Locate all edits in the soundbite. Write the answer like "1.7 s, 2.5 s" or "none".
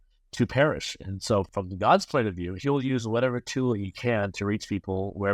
1.5 s